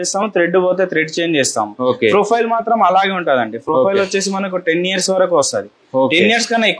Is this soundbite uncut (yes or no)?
yes